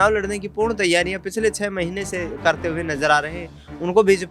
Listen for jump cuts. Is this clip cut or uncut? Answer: uncut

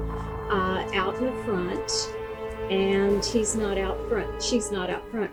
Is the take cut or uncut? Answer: uncut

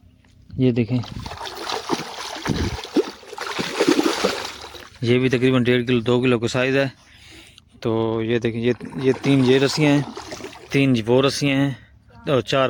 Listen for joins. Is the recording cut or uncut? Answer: uncut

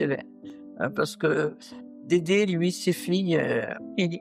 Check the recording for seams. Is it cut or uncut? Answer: cut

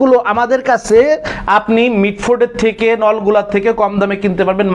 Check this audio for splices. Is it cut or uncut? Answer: uncut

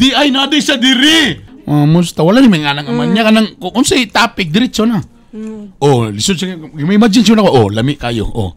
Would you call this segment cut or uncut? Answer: cut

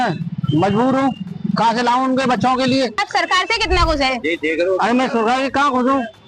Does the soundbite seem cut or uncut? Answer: cut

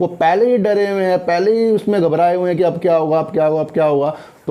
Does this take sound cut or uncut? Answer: uncut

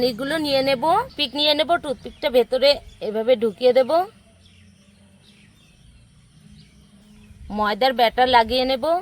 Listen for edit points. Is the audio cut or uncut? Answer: cut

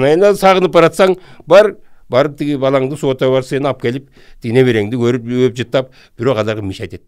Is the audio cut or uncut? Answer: uncut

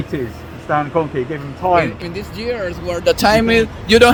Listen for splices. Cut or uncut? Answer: uncut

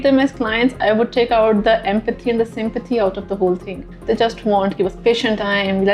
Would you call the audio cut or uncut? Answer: cut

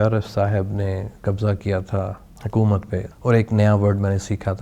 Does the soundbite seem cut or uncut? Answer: cut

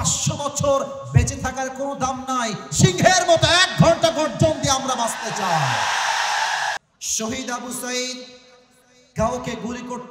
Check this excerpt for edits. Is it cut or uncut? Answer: cut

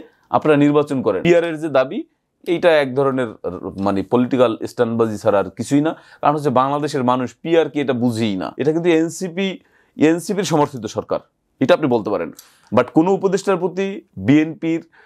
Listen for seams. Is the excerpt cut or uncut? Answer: cut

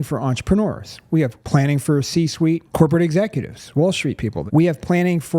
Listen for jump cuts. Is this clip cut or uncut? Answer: cut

